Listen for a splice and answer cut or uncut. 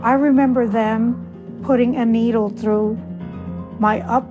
cut